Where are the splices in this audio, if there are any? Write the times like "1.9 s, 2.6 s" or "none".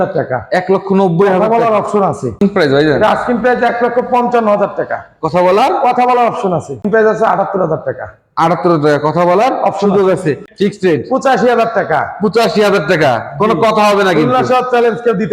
2.4 s, 6.9 s, 10.5 s

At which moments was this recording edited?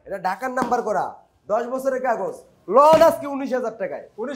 none

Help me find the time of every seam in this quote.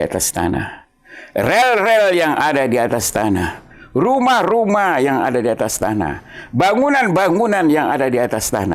none

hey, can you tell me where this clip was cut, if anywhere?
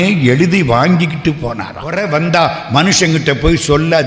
1.9 s

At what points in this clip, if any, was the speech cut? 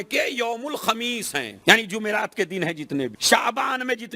1.5 s, 3.2 s

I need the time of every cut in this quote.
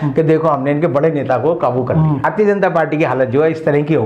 2.2 s

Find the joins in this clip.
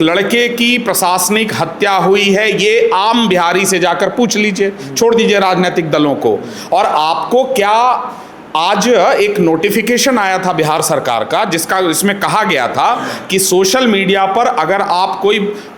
none

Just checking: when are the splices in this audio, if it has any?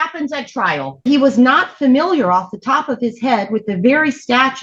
1.0 s

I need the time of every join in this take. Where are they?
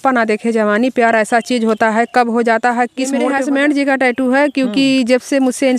2.6 s

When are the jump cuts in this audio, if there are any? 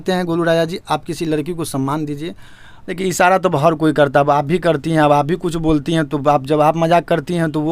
2.9 s

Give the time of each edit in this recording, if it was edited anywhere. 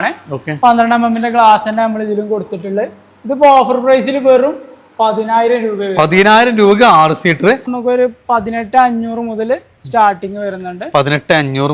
7.7 s

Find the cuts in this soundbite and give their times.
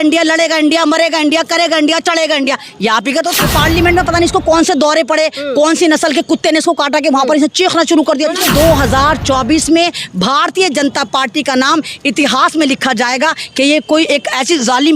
3.4 s, 8.4 s

